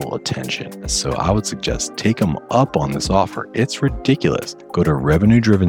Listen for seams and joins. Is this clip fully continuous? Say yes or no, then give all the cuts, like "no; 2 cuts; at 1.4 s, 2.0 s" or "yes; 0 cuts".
no; 2 cuts; at 0.9 s, 4.6 s